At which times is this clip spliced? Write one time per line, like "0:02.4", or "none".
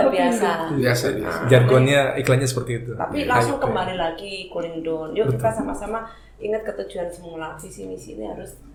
none